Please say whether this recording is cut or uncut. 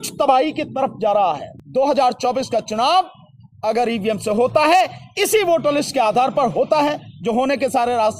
cut